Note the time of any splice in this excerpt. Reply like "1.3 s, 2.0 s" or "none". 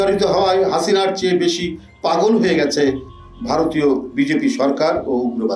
none